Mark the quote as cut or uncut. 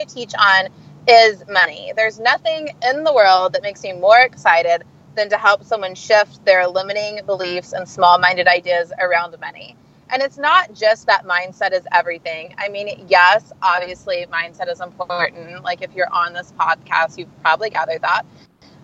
uncut